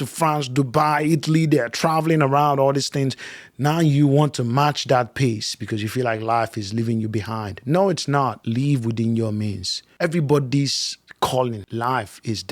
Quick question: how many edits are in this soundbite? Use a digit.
2